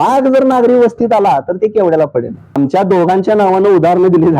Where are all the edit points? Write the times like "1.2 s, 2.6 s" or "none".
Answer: 2.4 s